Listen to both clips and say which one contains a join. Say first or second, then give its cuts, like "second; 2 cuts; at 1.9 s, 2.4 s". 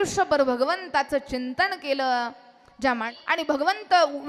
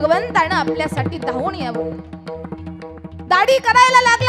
first; 1 cut; at 3.1 s